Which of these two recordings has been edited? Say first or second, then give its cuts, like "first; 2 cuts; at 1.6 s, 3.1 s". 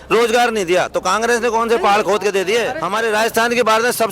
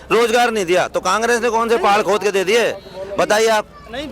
first; 1 cut; at 2.8 s